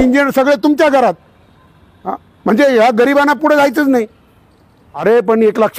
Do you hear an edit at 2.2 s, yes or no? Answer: no